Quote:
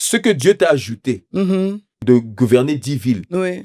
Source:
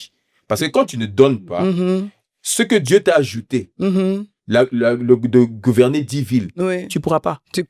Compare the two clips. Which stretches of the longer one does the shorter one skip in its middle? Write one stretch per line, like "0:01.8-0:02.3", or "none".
0:04.4-0:05.2